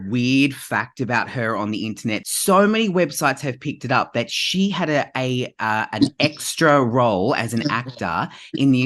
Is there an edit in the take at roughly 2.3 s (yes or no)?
yes